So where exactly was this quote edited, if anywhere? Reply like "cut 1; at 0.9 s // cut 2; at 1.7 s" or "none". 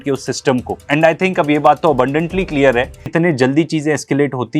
cut 1; at 3.1 s